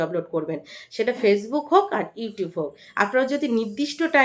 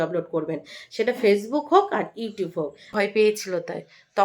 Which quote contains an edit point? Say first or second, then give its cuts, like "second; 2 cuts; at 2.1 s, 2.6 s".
second; 1 cut; at 3.1 s